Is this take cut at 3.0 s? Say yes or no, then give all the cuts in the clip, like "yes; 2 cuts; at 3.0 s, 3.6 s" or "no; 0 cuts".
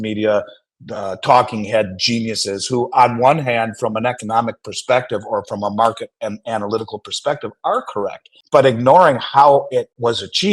no; 1 cut; at 8.3 s